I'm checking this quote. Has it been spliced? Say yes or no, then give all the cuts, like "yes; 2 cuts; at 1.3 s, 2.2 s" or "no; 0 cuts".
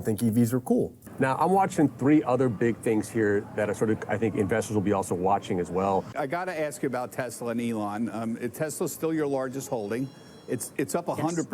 yes; 2 cuts; at 1.0 s, 6.1 s